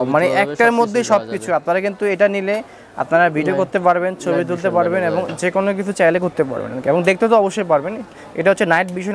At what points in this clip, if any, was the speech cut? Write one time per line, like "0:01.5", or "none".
none

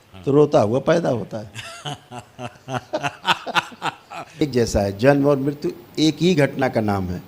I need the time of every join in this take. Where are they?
0:04.4

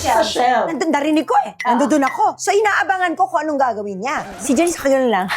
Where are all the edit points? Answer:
0:04.3

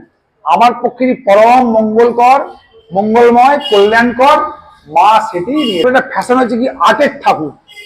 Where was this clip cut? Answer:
0:05.8

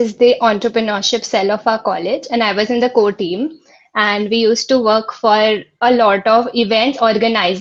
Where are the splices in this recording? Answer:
none

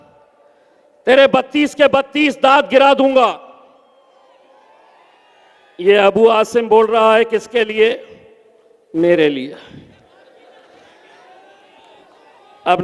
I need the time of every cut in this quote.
none

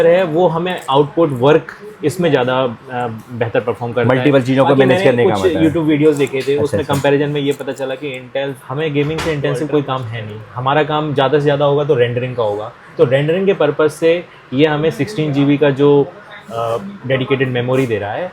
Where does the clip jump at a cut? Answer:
0:08.6

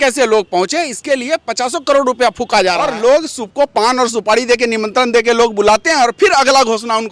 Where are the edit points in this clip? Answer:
0:02.8

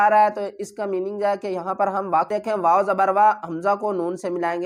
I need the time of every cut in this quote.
0:02.3

